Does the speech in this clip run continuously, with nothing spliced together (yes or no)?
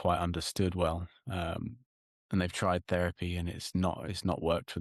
yes